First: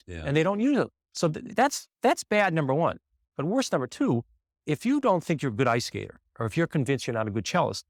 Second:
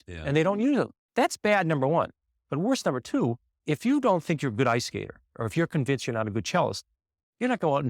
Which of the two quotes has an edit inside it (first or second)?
second